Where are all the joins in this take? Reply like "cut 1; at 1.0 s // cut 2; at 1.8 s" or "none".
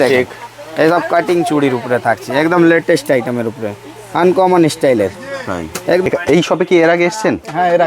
cut 1; at 6.0 s